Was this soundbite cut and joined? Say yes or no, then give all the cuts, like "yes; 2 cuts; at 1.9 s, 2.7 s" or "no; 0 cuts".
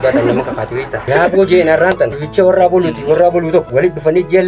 yes; 3 cuts; at 1.0 s, 2.2 s, 3.7 s